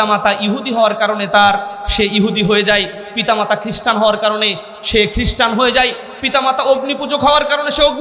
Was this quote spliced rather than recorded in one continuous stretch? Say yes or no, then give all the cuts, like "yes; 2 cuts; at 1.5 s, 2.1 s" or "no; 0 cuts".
no; 0 cuts